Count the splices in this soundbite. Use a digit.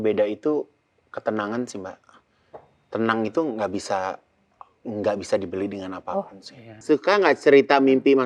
1